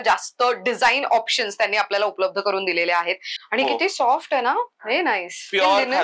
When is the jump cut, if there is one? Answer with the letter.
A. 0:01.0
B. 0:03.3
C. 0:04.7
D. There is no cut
B